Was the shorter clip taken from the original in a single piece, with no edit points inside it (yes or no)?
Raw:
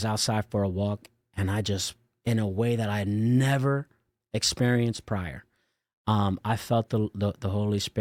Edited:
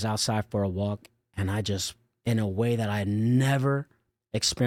yes